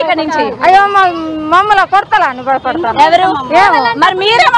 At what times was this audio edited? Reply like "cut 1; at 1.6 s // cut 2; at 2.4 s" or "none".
none